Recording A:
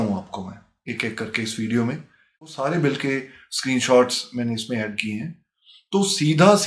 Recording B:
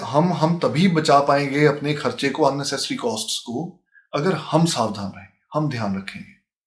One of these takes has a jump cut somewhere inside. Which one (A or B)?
A